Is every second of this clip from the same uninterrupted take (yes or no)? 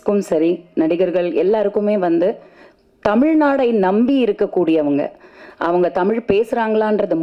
yes